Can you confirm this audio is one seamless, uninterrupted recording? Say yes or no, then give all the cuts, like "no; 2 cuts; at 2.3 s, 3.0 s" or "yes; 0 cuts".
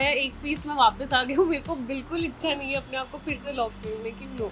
yes; 0 cuts